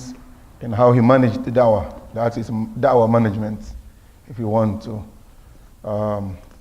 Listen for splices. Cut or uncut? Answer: cut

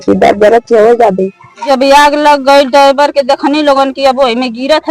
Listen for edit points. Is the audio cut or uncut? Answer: cut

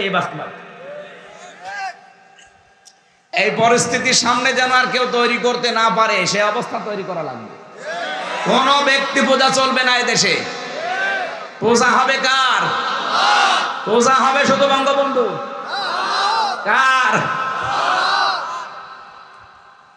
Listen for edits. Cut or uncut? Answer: uncut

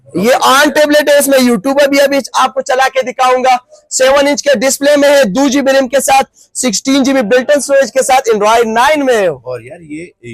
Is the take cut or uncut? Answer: uncut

